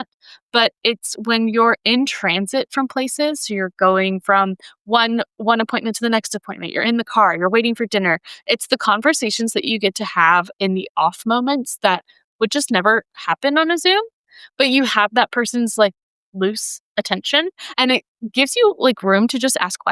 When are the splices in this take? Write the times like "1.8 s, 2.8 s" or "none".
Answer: none